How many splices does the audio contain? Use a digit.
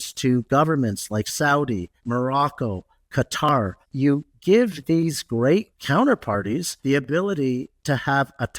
4